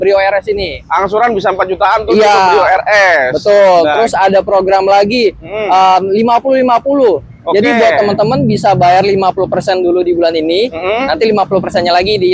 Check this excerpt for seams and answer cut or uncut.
uncut